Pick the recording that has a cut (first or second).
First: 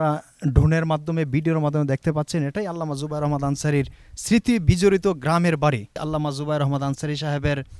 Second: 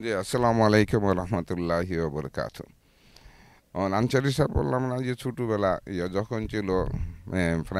first